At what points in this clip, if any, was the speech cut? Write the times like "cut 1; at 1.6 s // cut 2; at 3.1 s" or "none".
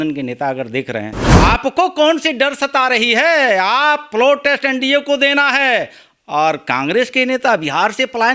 cut 1; at 1.2 s